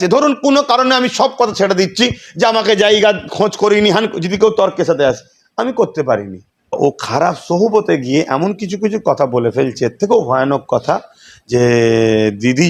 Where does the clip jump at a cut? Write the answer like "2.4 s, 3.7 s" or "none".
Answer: 6.8 s